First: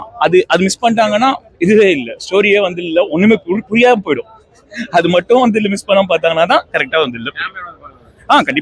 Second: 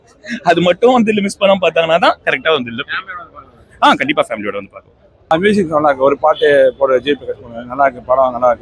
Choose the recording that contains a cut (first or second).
second